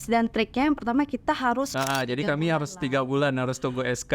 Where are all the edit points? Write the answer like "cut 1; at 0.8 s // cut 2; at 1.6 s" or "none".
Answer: cut 1; at 1.7 s

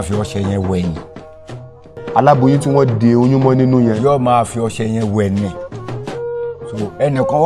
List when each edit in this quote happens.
cut 1; at 5.5 s // cut 2; at 6.7 s

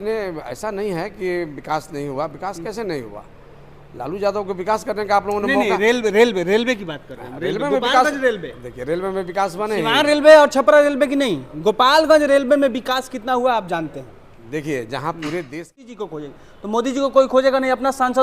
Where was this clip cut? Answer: cut 1; at 15.9 s

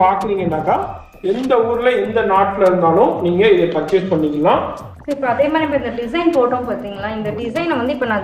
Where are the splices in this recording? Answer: cut 1; at 4.9 s

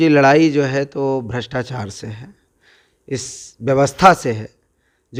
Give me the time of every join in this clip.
none

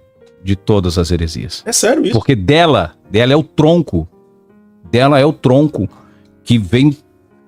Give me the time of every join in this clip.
none

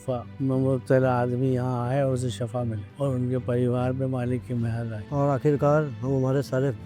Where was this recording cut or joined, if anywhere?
none

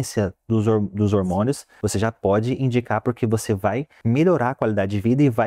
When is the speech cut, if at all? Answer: cut 1; at 1.7 s // cut 2; at 3.9 s

